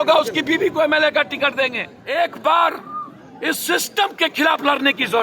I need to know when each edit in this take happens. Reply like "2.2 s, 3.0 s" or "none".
1.9 s